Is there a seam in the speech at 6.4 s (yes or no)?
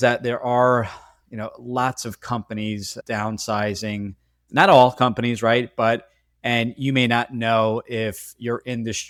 no